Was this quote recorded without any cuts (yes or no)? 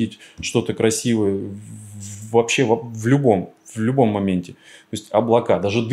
yes